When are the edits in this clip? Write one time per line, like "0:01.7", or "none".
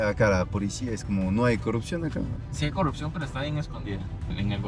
none